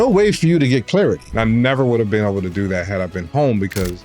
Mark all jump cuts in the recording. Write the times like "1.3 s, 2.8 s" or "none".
1.3 s

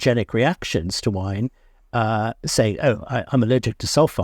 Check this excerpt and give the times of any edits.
none

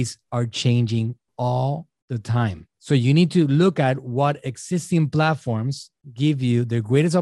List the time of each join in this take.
2.7 s

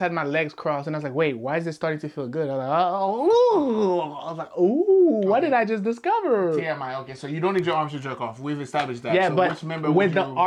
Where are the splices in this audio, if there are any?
none

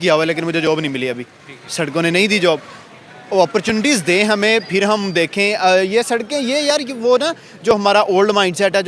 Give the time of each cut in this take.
none

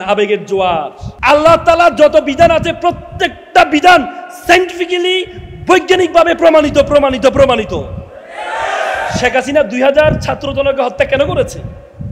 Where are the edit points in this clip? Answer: 1.0 s

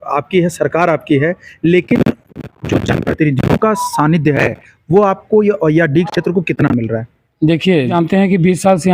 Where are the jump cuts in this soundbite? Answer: 7.9 s

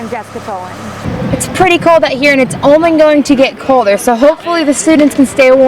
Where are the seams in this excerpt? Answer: 1.0 s

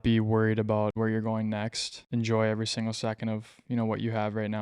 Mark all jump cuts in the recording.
0.9 s, 1.9 s

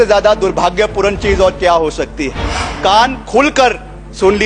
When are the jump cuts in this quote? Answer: 2.6 s

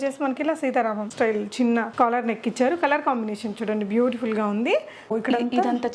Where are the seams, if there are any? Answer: 1.1 s, 1.9 s, 5.1 s

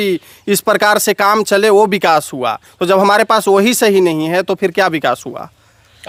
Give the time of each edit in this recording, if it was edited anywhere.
none

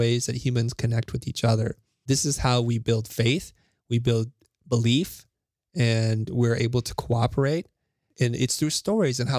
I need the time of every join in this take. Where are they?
2.0 s, 8.1 s

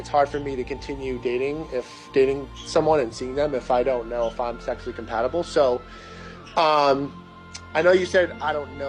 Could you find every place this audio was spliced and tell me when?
5.6 s

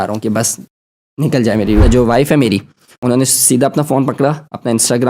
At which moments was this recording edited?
1.8 s, 2.9 s

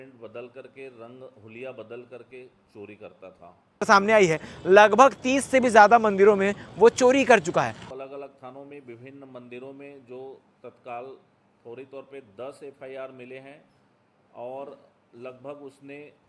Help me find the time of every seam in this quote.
3.9 s, 7.8 s

